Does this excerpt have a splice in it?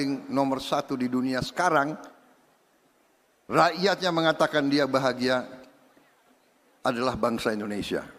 no; 0 cuts

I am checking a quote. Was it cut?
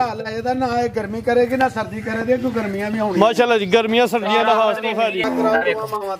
yes; 1 cut; at 5.2 s

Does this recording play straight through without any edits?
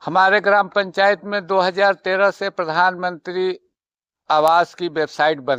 yes; 0 cuts

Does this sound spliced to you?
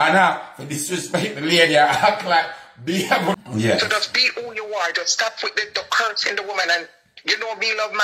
yes; 1 cut; at 3.4 s

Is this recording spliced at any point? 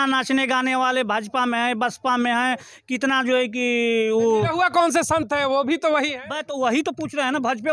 no; 0 cuts

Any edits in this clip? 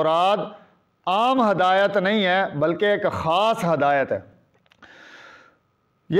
yes; 1 cut; at 4.3 s

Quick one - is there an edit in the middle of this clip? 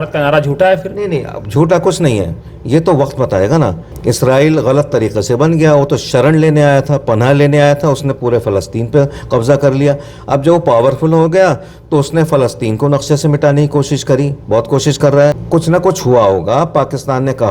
yes; 2 cuts; at 3.9 s, 15.4 s

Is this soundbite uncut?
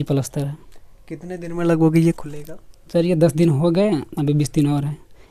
yes; 0 cuts

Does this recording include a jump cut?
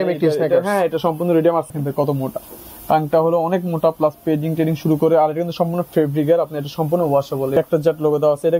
yes; 2 cuts; at 1.7 s, 7.5 s

